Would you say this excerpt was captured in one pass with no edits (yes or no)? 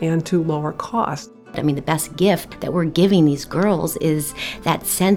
no